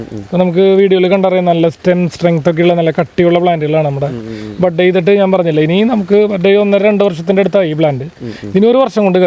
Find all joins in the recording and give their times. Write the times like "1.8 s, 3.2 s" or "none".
none